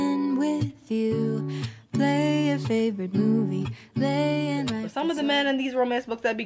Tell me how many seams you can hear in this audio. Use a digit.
1